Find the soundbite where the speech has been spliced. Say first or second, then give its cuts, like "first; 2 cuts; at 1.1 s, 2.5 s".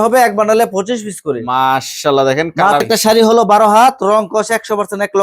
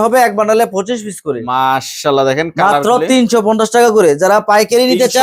first; 1 cut; at 2.8 s